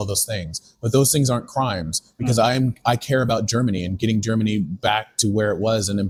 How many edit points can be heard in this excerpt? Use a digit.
0